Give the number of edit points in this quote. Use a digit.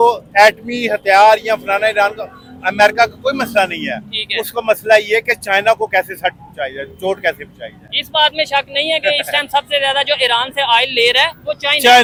0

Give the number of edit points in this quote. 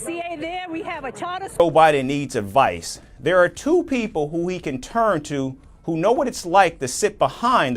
1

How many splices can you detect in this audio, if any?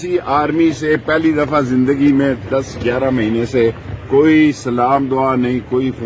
0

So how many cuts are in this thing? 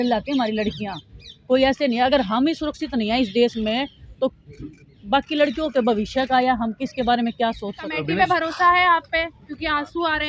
1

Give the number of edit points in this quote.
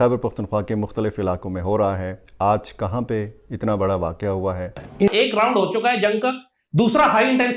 1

